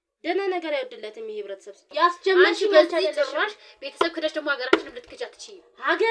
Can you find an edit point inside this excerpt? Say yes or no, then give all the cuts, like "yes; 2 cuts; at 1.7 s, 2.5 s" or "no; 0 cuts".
yes; 1 cut; at 1.8 s